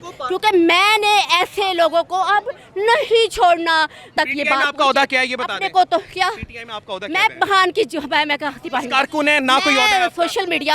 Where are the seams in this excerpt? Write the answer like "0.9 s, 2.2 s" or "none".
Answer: 4.1 s